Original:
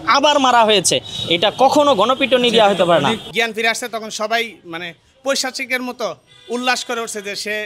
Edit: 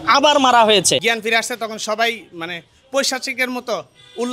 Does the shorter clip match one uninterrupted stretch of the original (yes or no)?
no